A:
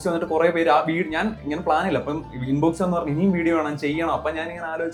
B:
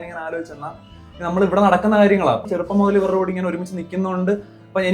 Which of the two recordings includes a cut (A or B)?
B